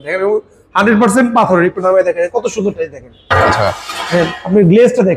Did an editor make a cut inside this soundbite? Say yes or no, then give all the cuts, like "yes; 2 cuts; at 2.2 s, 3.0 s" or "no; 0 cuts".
no; 0 cuts